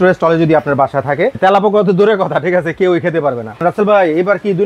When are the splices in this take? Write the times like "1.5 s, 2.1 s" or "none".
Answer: 1.4 s, 3.6 s